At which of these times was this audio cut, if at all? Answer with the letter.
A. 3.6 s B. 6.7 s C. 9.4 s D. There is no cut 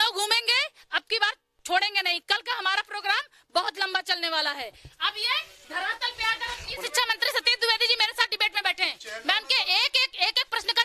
B